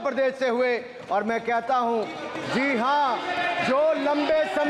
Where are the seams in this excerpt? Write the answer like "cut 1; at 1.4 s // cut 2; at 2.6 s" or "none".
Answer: none